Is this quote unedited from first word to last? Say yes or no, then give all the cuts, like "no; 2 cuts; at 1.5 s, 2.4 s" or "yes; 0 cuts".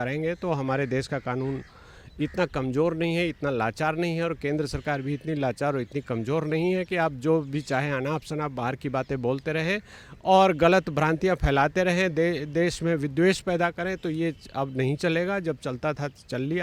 yes; 0 cuts